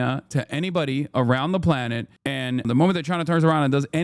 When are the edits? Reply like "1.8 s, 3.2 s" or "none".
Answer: 2.6 s